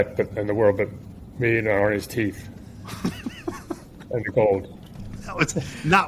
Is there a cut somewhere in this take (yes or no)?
no